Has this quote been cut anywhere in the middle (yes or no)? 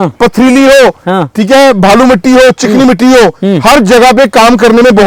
no